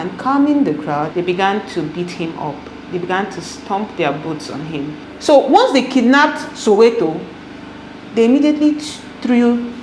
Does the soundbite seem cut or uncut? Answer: cut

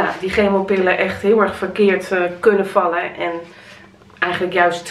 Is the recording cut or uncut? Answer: uncut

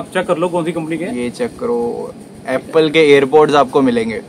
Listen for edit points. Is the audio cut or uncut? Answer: uncut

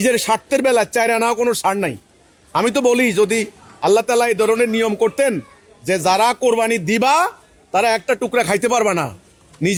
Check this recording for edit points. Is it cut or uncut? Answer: uncut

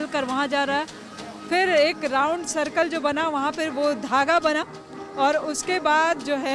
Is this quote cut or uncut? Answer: uncut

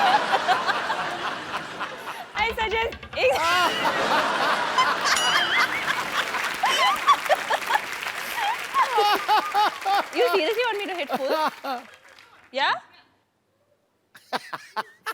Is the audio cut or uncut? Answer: uncut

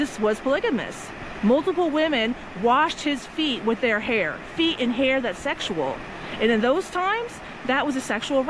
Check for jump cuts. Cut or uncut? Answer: uncut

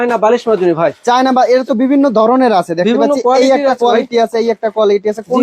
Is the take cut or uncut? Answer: uncut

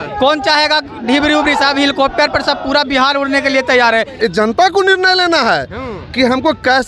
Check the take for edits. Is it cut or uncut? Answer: cut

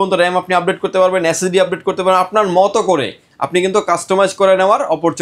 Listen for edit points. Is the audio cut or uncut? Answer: uncut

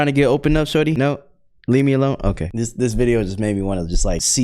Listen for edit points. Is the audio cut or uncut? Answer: cut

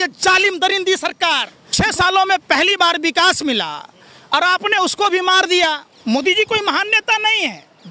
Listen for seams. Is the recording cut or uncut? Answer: cut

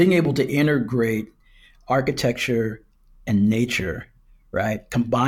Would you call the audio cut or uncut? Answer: uncut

